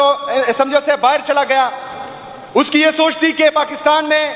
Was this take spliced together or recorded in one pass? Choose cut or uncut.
uncut